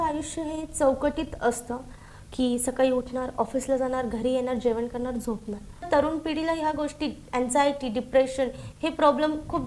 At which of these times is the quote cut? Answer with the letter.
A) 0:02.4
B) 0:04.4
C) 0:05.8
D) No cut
C